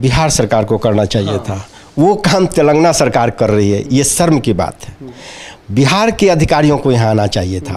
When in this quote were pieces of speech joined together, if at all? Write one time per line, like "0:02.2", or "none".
none